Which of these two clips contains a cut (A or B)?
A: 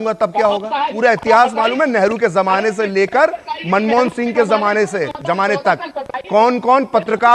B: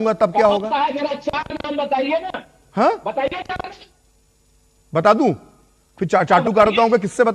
A